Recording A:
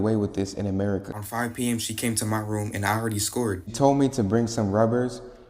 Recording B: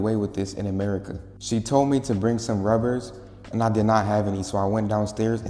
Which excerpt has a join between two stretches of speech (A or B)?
A